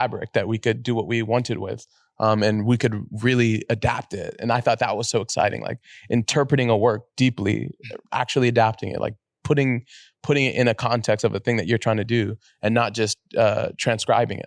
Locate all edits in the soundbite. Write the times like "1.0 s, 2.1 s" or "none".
none